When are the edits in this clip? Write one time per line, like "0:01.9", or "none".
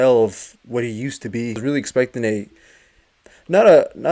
0:01.6